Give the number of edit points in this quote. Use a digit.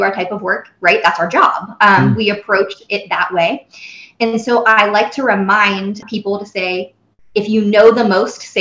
1